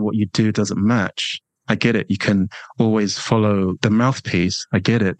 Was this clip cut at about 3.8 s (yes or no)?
yes